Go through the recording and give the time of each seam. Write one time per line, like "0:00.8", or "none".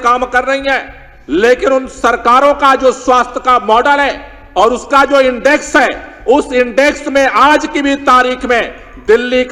none